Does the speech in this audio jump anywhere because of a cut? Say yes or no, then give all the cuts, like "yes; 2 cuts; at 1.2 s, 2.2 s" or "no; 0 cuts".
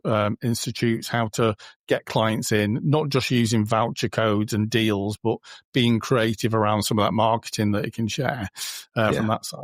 no; 0 cuts